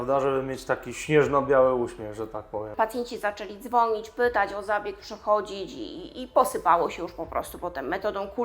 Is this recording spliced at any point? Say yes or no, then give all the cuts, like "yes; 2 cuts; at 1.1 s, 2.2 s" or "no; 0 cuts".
yes; 1 cut; at 2.7 s